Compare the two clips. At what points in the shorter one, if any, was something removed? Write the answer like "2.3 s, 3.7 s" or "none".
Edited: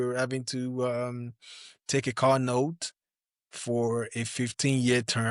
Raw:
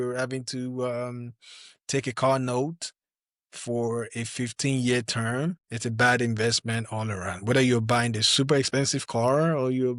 none